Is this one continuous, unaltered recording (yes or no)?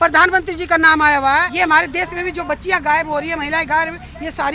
no